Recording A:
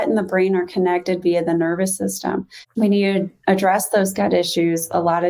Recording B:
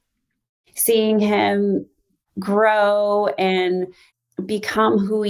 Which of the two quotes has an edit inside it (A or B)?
A